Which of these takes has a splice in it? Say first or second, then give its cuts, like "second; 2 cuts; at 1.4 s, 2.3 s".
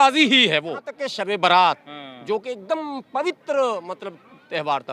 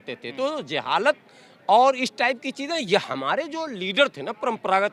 first; 1 cut; at 1.0 s